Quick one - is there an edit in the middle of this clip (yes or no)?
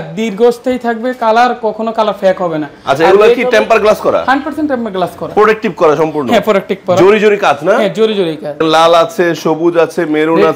yes